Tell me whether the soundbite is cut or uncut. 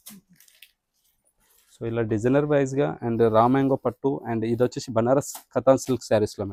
uncut